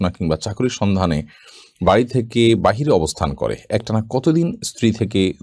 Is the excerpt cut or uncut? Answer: uncut